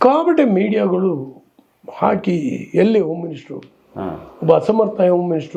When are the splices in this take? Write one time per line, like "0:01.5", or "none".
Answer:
none